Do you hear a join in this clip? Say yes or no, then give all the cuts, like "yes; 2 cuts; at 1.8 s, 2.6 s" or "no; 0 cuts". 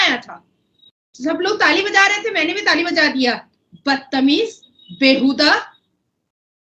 no; 0 cuts